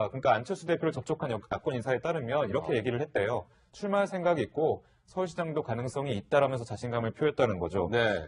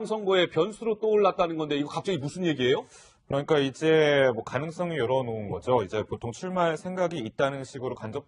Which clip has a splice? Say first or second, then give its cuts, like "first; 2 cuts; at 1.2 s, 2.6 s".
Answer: second; 1 cut; at 1.7 s